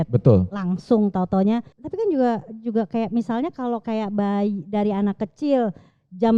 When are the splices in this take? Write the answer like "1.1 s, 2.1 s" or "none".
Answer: 1.8 s